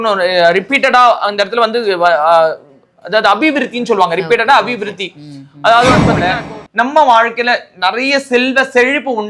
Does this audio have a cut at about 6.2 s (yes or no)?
yes